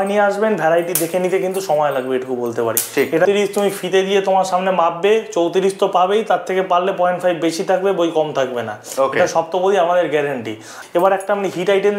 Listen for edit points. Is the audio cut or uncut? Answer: cut